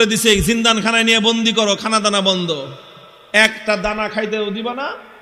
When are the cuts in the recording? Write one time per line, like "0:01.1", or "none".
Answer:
none